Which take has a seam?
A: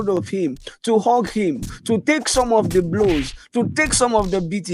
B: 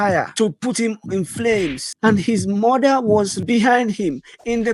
B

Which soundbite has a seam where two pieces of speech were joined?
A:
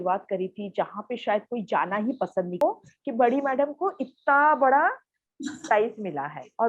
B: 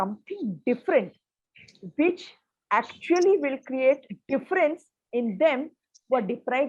A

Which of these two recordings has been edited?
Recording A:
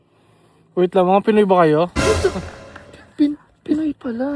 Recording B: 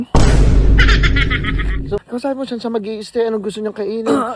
B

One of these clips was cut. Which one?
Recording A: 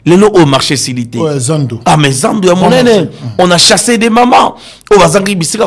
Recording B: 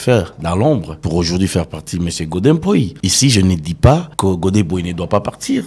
B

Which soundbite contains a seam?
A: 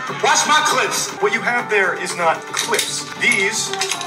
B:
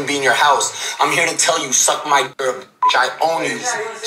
A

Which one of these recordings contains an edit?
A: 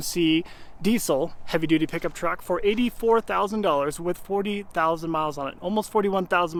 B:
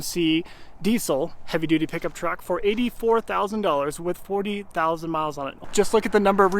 B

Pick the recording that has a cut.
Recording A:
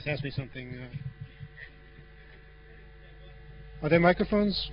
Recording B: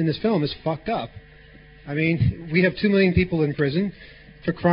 B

